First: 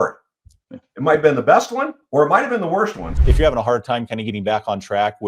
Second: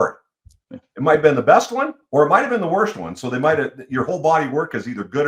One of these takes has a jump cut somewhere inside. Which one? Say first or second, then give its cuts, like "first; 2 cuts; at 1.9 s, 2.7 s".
first; 1 cut; at 3.1 s